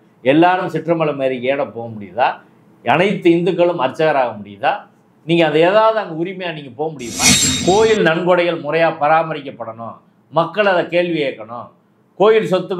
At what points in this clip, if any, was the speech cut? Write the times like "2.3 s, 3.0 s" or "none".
7.4 s